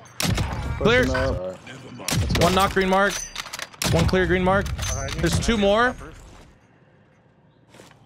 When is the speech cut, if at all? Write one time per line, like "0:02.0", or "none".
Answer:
0:01.4